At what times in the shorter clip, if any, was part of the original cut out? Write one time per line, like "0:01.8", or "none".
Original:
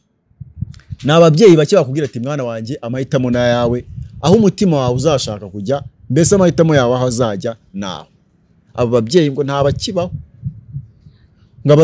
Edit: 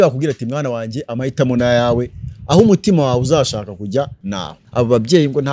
0:04.2